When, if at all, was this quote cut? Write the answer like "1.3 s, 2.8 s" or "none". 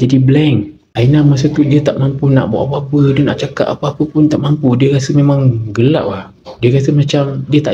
none